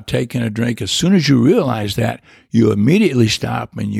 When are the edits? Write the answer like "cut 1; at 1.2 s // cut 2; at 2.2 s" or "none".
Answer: none